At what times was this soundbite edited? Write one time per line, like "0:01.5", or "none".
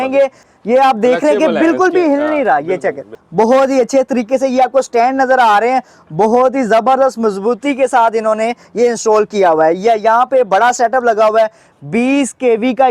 0:03.2